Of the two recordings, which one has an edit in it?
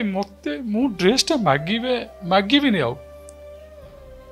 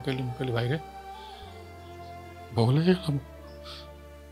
second; 3 cuts; at 0.8 s, 2.5 s, 3.2 s

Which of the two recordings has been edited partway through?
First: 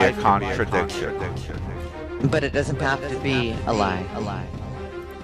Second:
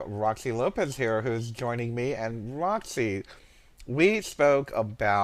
second; 1 cut; at 2.4 s

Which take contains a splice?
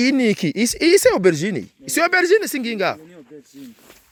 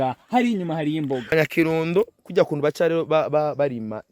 second; 1 cut; at 1.3 s

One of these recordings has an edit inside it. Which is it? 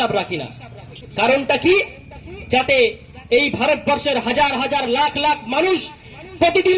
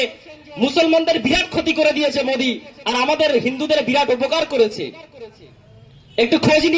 first; 1 cut; at 1.0 s

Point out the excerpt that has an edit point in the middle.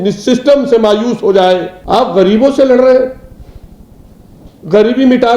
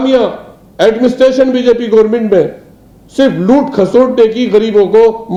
first; 1 cut; at 1.7 s

